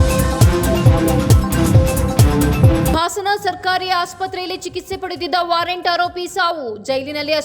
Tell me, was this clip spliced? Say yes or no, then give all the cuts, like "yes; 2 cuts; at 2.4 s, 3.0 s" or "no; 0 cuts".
yes; 1 cut; at 2.9 s